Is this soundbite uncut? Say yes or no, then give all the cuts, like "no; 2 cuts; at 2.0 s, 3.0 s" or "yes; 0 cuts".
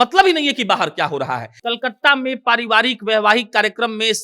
no; 1 cut; at 1.5 s